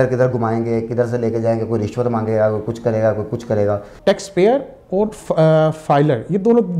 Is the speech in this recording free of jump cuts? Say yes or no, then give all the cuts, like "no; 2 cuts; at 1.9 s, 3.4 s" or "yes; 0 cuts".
no; 1 cut; at 3.9 s